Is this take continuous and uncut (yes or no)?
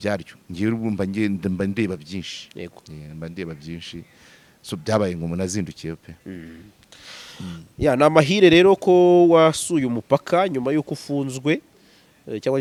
yes